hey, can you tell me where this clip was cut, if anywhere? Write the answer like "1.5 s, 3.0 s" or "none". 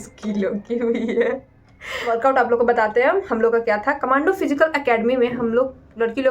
2.0 s